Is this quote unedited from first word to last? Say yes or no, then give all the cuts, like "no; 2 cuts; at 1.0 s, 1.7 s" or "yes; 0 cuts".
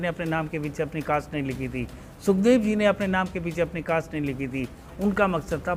yes; 0 cuts